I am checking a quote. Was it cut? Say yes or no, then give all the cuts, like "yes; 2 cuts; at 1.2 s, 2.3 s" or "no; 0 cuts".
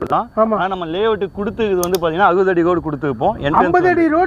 no; 0 cuts